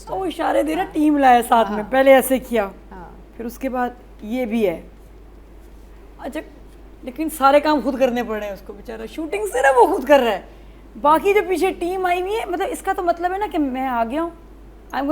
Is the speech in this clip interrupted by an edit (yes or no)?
no